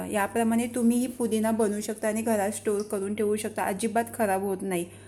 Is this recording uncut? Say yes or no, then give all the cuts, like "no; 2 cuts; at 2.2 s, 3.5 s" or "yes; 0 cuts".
yes; 0 cuts